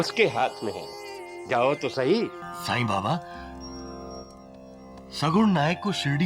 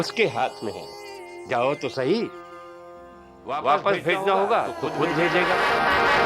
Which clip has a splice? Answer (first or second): first